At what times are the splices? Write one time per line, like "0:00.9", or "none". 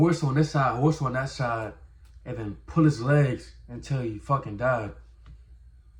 none